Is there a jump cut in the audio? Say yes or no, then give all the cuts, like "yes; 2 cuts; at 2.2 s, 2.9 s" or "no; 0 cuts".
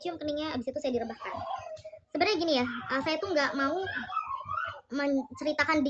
no; 0 cuts